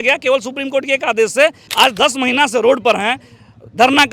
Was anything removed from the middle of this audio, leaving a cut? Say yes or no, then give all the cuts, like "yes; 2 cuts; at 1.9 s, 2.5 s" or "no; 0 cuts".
yes; 1 cut; at 1.6 s